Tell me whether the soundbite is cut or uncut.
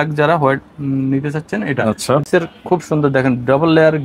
cut